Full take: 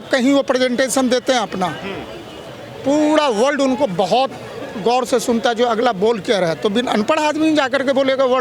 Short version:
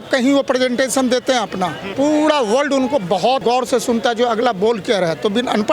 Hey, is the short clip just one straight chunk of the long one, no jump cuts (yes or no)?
no